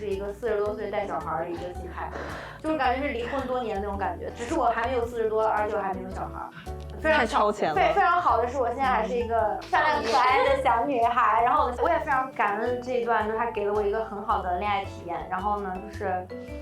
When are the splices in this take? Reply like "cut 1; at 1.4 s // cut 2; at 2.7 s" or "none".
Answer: none